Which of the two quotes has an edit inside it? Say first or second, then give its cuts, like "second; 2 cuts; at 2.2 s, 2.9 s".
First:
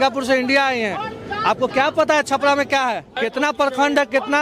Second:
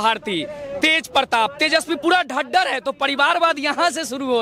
first; 1 cut; at 3.1 s